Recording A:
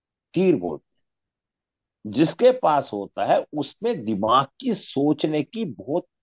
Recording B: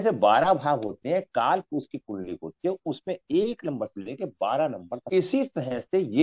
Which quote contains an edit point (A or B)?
B